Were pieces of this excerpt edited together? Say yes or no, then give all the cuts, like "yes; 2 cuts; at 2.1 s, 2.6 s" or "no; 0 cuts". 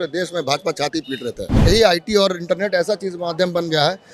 yes; 1 cut; at 1.6 s